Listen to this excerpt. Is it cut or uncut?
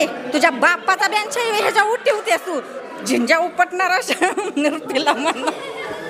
uncut